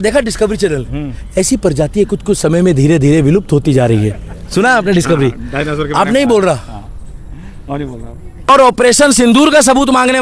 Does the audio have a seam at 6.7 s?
no; 1 cut; at 8.5 s

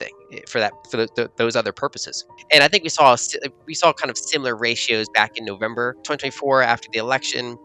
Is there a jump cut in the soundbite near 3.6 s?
no; 2 cuts; at 2.2 s, 6.0 s

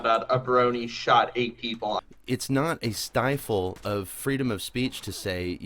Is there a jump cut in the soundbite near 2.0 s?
yes; 1 cut; at 2.0 s

